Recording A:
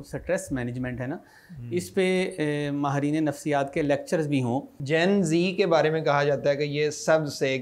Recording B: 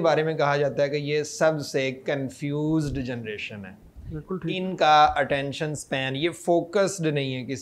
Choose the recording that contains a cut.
A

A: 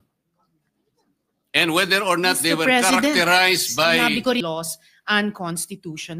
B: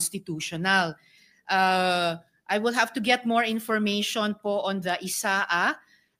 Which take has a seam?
A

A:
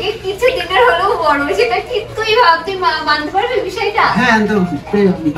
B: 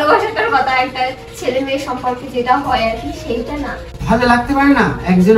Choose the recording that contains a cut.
B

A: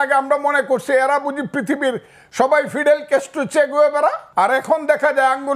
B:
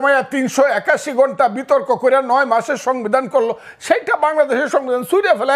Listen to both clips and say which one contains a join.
A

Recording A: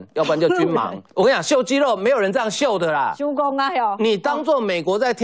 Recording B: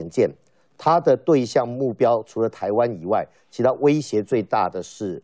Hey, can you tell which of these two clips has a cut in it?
A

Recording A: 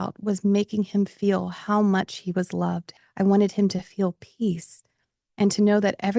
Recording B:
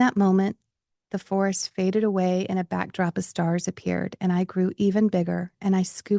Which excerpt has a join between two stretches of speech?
A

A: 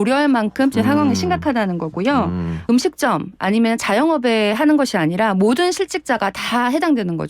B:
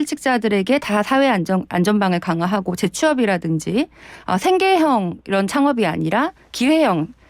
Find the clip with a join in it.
A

